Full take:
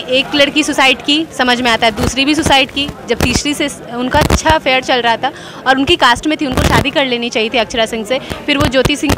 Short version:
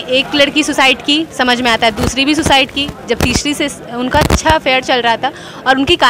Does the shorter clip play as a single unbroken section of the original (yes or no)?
yes